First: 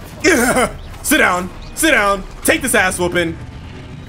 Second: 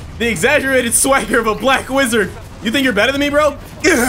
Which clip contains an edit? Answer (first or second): second